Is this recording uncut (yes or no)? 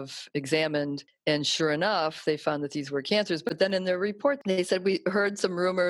no